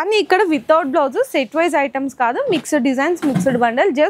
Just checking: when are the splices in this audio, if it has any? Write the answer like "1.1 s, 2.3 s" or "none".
none